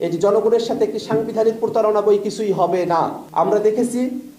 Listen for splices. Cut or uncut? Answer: cut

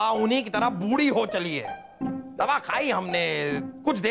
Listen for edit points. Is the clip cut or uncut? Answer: uncut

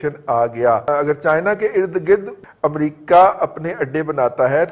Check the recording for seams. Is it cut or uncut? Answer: cut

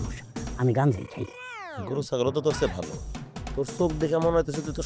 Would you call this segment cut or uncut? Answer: uncut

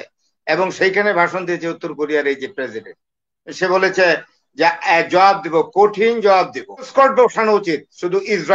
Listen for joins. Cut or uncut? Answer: cut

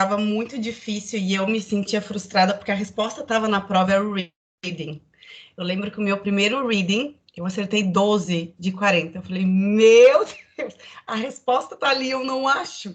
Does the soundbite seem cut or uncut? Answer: uncut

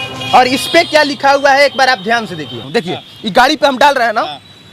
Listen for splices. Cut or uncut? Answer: cut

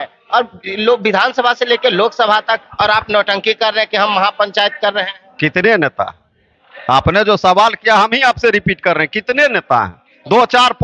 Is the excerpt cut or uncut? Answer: uncut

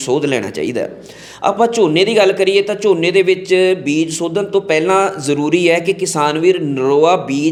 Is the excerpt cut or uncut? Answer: uncut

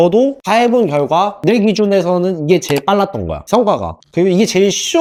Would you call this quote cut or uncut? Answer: uncut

